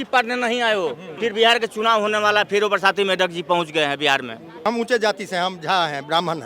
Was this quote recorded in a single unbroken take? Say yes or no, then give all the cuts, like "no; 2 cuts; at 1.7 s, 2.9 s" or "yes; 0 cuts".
no; 2 cuts; at 1.1 s, 4.6 s